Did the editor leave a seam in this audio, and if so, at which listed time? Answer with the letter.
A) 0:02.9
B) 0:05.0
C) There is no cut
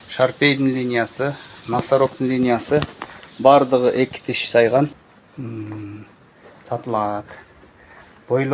B